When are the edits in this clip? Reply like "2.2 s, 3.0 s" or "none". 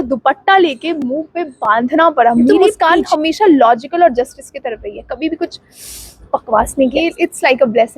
2.9 s, 7.0 s